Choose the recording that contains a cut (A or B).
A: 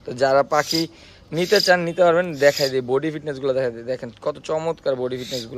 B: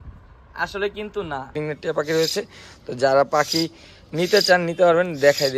B